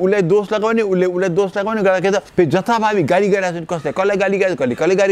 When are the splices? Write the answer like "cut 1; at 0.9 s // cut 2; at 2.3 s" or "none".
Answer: cut 1; at 2.3 s